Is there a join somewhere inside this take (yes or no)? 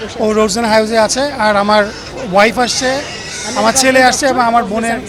no